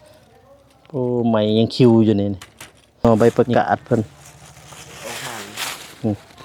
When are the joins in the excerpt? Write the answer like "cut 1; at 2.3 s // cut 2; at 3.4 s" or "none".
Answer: cut 1; at 3.0 s